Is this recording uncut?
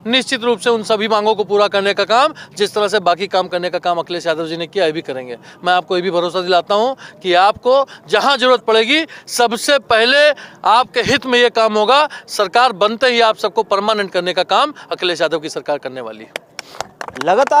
yes; 0 cuts

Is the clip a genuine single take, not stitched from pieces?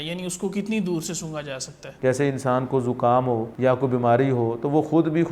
no; 2 cuts; at 1.8 s, 3.5 s

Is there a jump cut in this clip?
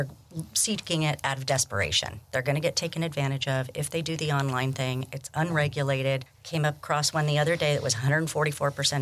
yes; 1 cut; at 6.4 s

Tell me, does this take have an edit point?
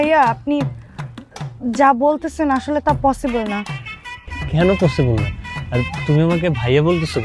no; 0 cuts

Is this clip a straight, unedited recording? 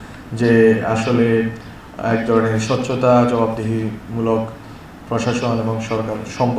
yes; 0 cuts

